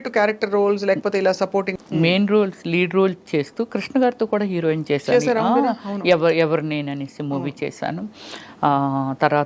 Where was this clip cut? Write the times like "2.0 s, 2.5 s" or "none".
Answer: 1.7 s